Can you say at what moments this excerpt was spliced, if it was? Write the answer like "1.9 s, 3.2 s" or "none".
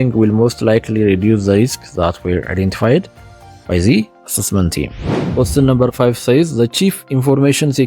5.2 s

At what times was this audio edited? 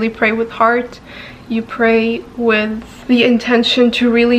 none

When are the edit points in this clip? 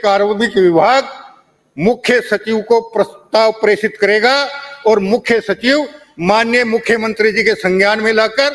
none

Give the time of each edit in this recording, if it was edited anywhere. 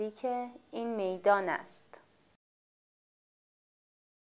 none

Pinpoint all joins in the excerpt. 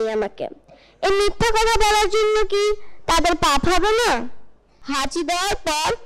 4.8 s

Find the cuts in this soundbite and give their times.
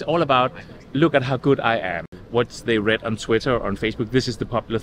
2.1 s

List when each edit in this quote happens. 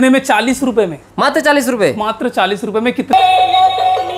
3.1 s

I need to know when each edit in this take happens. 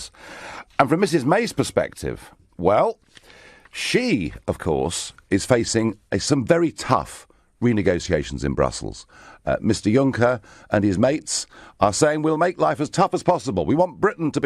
7.3 s

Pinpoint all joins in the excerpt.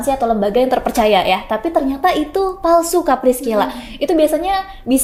none

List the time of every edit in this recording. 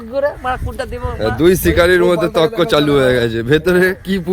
none

